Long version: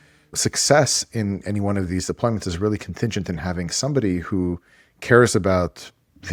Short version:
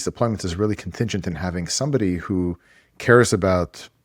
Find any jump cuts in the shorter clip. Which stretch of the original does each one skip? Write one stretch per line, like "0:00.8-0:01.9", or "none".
none